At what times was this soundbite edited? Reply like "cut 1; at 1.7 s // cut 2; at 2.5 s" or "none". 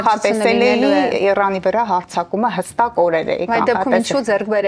none